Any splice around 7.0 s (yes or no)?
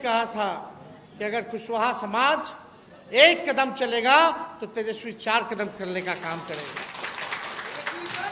no